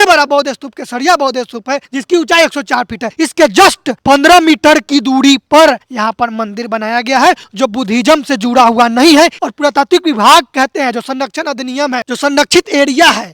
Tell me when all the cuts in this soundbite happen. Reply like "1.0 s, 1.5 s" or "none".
12.1 s